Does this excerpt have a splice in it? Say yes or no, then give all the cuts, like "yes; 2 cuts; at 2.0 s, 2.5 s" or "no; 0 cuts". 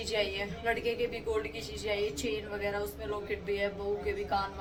no; 0 cuts